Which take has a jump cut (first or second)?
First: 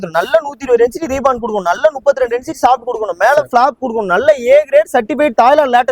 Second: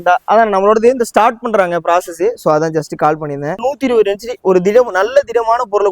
second